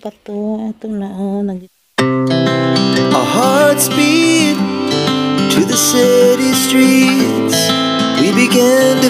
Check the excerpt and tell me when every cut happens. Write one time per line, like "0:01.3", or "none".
0:01.7

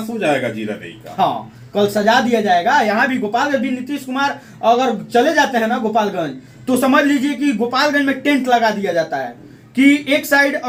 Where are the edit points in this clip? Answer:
none

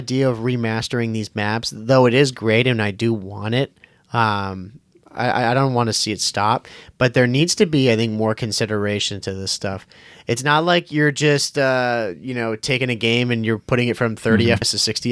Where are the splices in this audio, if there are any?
none

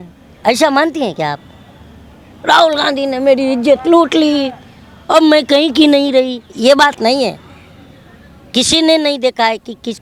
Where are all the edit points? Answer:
none

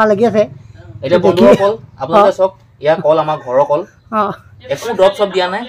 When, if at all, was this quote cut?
none

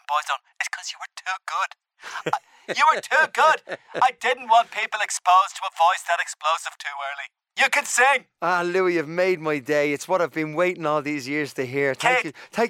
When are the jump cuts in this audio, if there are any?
0:07.5

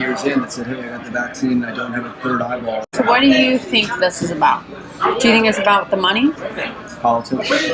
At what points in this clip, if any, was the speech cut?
0:02.9
0:06.5

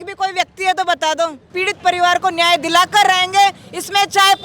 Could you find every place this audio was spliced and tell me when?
0:01.5

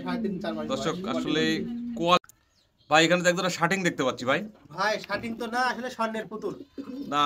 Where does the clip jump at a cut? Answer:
0:02.2

